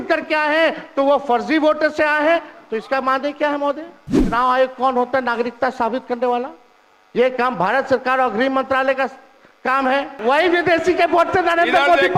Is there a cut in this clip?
yes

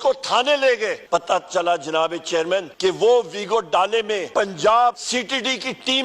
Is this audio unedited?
no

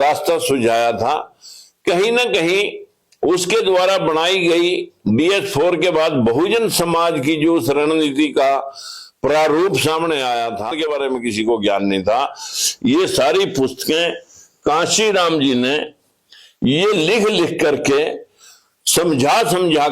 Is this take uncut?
no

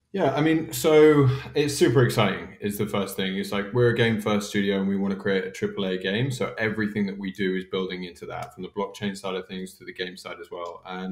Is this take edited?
no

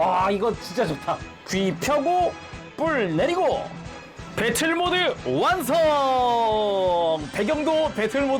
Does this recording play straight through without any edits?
no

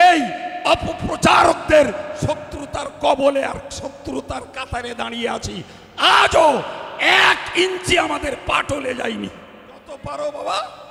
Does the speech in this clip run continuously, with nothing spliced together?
no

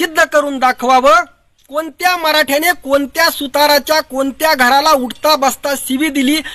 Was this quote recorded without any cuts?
no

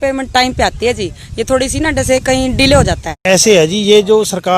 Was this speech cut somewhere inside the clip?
yes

